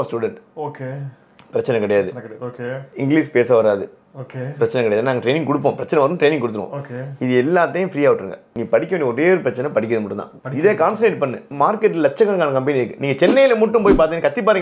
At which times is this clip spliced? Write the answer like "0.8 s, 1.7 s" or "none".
11.5 s

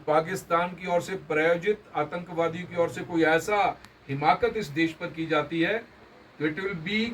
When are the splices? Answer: none

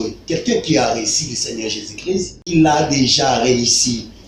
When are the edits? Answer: 2.4 s

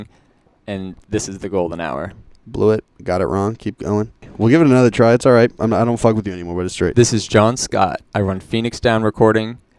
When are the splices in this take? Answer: 4.2 s, 8.0 s

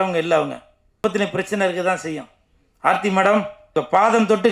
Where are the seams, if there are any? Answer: 1.0 s, 3.6 s

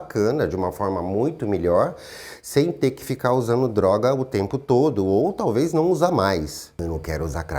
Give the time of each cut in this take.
6.7 s

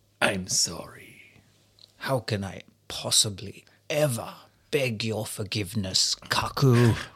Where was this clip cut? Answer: none

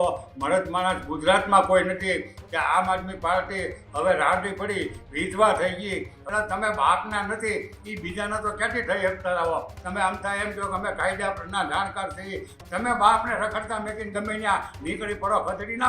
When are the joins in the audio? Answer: 2.4 s, 6.2 s, 9.8 s, 12.6 s

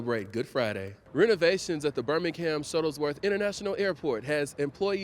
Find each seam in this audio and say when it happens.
0.9 s

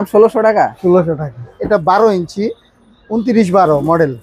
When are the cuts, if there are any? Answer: 1.6 s

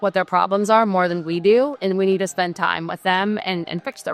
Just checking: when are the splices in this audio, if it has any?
none

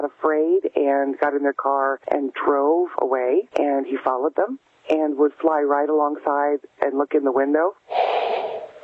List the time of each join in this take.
2.0 s, 3.5 s

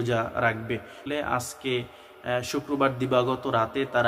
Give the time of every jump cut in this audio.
1.1 s

